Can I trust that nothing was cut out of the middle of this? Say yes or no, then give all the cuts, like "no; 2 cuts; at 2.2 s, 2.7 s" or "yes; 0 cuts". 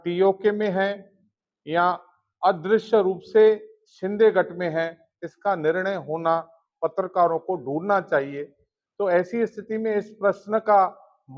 yes; 0 cuts